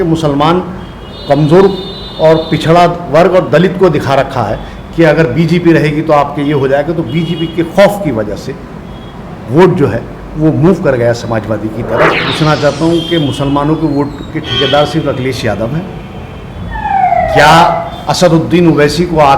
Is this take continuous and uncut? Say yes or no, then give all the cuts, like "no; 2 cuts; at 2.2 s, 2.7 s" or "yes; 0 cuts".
no; 1 cut; at 12.2 s